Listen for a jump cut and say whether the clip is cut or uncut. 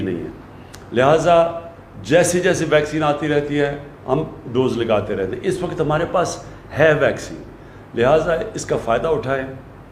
uncut